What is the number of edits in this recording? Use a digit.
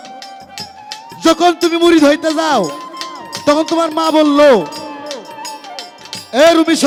0